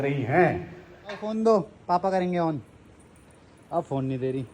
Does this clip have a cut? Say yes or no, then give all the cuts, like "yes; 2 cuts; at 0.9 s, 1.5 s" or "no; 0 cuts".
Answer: yes; 1 cut; at 1.2 s